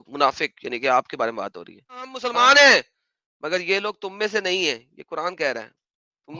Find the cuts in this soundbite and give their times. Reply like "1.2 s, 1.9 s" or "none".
2.2 s